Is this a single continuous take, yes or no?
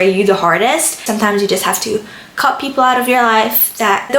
no